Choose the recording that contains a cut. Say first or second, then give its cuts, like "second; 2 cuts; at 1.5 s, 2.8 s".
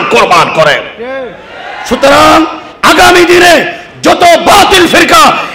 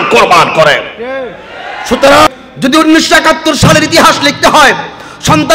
second; 1 cut; at 2.3 s